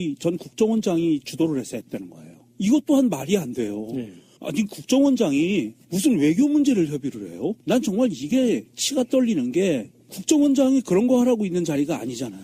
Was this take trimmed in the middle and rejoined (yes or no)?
no